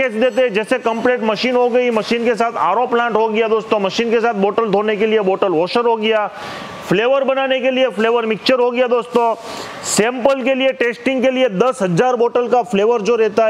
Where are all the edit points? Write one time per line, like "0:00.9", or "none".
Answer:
none